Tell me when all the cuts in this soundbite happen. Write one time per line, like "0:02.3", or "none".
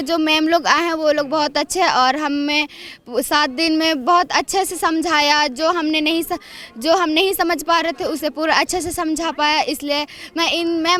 none